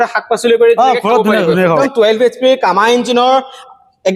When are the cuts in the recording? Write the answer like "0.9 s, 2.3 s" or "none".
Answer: 1.8 s

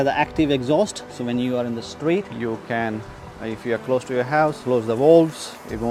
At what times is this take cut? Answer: none

